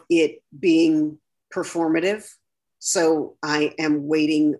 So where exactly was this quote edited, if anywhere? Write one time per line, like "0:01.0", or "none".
none